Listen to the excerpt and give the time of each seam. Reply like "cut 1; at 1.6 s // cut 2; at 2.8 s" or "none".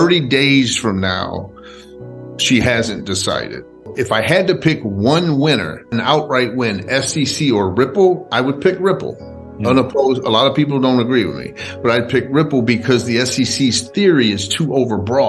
cut 1; at 3.9 s // cut 2; at 5.8 s